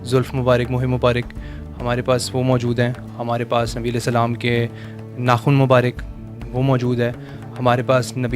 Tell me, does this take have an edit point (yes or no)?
no